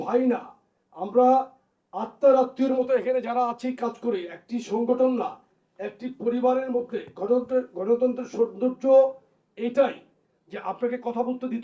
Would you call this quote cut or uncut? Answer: uncut